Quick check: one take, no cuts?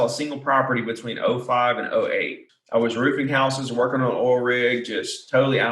no; 1 cut; at 2.4 s

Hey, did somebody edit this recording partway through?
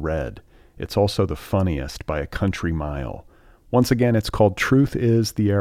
no; 0 cuts

